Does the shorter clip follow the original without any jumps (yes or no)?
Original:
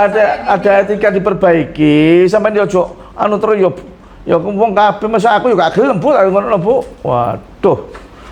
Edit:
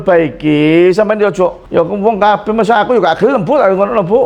no